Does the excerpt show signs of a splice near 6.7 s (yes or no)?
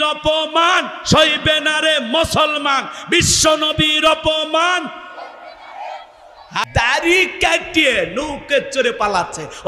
yes